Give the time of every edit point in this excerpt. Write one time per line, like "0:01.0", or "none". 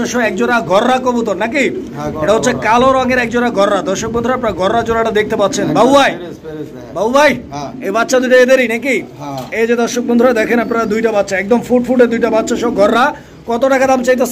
none